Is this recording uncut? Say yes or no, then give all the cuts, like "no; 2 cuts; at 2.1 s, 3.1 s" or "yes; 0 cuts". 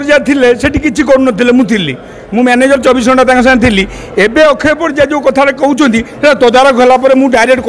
yes; 0 cuts